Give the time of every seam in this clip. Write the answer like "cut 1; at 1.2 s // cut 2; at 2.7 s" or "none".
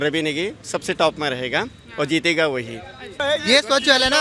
cut 1; at 3.2 s